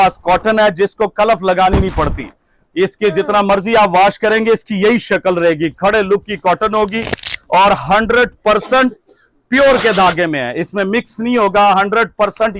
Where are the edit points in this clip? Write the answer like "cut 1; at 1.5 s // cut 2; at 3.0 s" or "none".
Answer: none